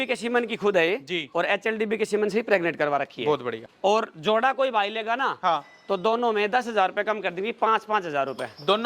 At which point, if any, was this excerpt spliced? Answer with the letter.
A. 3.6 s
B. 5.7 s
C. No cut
A